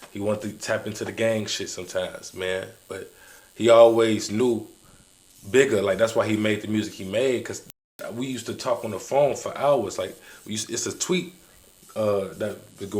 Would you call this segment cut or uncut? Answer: uncut